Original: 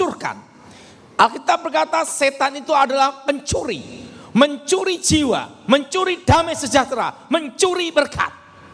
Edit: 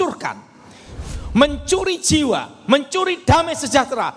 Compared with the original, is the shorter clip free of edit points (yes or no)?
no